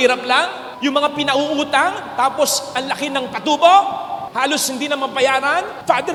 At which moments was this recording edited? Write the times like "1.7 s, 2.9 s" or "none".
none

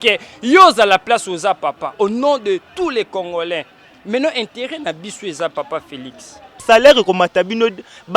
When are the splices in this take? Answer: 6.6 s

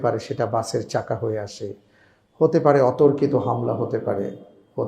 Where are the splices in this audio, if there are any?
none

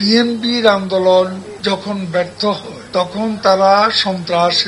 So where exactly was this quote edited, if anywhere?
1.5 s, 2.7 s

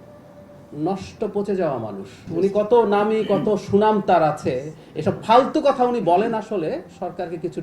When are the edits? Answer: 2.2 s

